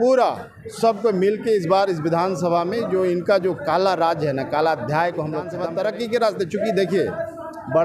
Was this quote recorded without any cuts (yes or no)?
no